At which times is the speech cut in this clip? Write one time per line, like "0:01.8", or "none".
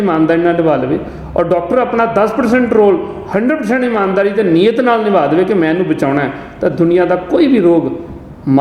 none